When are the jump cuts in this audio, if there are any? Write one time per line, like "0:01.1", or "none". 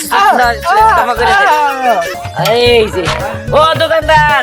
0:02.1